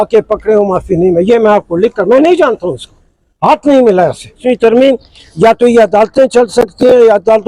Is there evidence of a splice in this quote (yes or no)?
yes